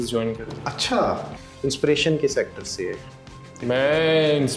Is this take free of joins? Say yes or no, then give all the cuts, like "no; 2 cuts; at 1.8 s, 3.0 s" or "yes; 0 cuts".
no; 2 cuts; at 1.4 s, 3.7 s